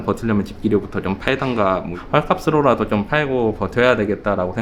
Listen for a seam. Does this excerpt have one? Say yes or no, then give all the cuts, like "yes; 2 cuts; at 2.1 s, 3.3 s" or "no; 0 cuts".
no; 0 cuts